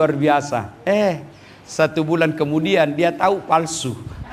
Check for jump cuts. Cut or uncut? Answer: uncut